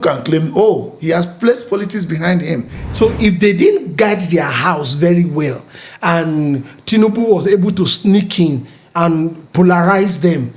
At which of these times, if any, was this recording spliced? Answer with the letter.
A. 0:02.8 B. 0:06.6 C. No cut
A